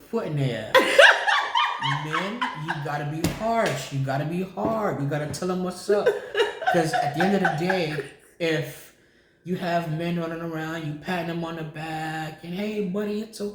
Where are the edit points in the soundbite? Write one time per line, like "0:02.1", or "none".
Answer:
none